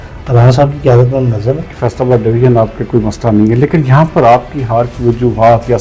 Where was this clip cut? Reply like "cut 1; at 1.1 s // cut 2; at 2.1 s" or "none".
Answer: cut 1; at 1.7 s